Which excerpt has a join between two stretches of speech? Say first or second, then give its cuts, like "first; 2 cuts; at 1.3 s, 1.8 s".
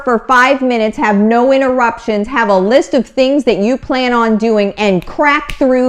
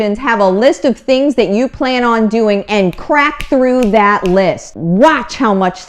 second; 1 cut; at 4.7 s